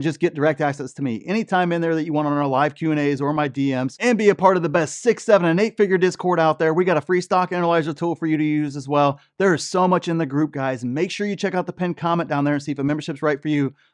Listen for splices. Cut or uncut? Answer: cut